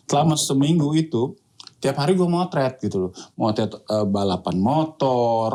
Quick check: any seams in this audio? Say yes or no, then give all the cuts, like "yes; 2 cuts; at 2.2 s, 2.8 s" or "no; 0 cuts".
no; 0 cuts